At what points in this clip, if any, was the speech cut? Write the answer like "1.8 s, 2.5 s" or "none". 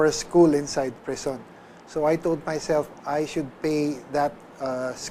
none